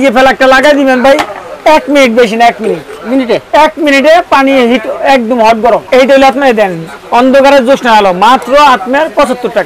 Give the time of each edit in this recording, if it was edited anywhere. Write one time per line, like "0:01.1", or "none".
0:05.8

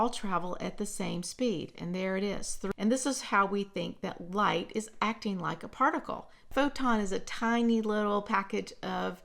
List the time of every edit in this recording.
0:02.6
0:06.5

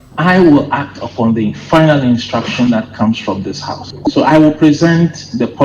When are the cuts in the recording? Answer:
none

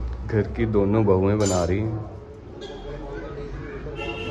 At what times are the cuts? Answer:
0:02.5

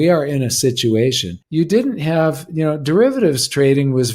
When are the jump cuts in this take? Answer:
0:01.3

